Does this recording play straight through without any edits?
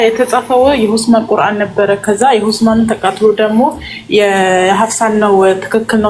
yes; 0 cuts

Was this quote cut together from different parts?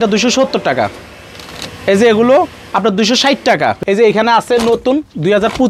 yes; 1 cut; at 3.8 s

